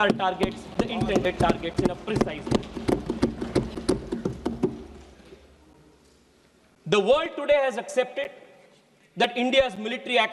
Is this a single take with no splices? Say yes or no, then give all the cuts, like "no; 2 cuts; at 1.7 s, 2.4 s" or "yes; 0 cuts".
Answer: yes; 0 cuts